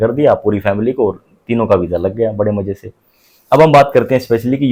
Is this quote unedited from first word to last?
yes; 0 cuts

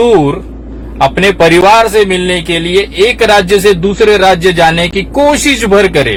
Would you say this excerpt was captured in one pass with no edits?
yes; 0 cuts

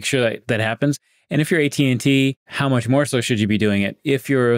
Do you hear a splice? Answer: yes; 1 cut; at 2.5 s

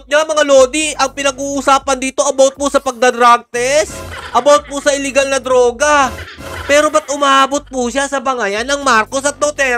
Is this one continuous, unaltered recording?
yes; 0 cuts

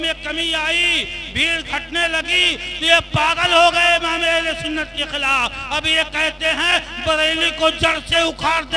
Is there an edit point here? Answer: no; 0 cuts

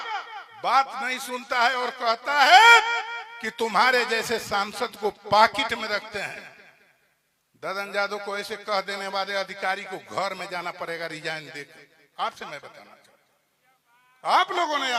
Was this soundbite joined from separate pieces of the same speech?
no; 0 cuts

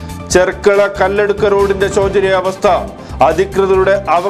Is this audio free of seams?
yes; 0 cuts

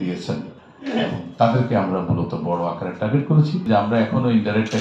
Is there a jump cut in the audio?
yes; 1 cut; at 3.7 s

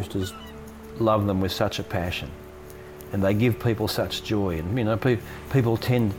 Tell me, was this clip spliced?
no; 0 cuts

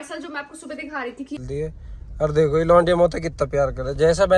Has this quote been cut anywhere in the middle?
yes; 1 cut; at 1.4 s

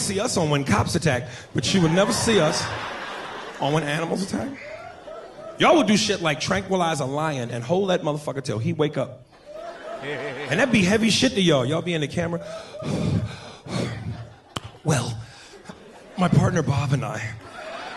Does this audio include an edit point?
yes; 2 cuts; at 6.8 s, 14.2 s

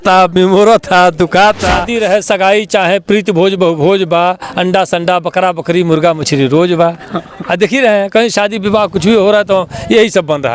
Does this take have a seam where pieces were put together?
yes; 1 cut; at 1.9 s

